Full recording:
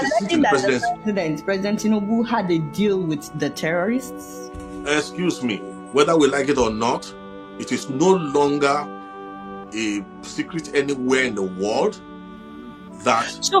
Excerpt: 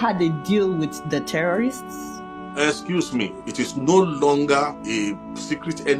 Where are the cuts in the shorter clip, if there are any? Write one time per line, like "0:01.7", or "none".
0:03.4
0:04.8